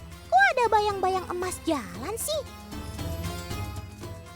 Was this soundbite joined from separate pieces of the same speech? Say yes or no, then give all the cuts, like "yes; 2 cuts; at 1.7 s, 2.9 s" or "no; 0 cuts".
yes; 1 cut; at 2.6 s